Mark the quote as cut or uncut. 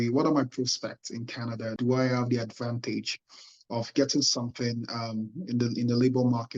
uncut